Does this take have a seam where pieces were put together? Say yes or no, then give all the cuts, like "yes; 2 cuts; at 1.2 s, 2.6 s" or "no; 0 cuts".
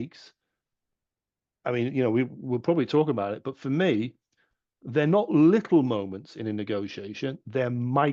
no; 0 cuts